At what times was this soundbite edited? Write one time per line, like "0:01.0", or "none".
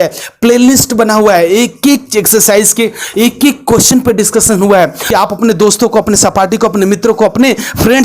0:05.0